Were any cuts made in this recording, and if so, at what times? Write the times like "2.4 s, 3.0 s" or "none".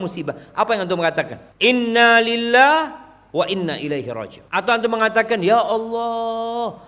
1.4 s, 4.3 s